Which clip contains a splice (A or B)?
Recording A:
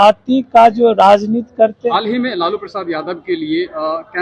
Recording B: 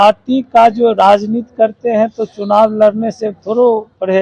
A